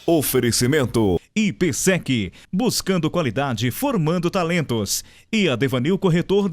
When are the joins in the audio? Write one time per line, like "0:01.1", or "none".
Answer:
0:01.3